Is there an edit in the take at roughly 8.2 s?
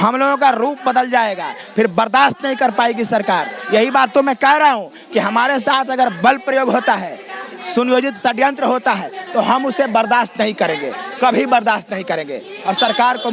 no; 0 cuts

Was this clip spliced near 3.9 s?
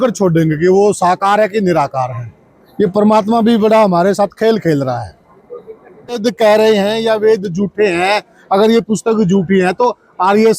no; 1 cut; at 6.2 s

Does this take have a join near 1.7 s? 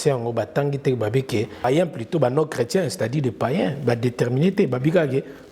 yes; 1 cut; at 1.7 s

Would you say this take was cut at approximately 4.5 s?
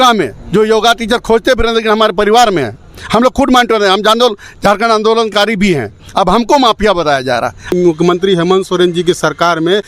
no; 1 cut; at 7.7 s

